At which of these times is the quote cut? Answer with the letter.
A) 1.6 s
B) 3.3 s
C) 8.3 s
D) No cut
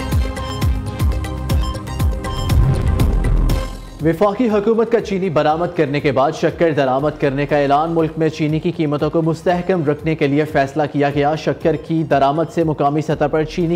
A